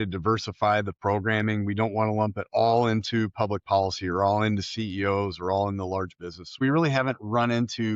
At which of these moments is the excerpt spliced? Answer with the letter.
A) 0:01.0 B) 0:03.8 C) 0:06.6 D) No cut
C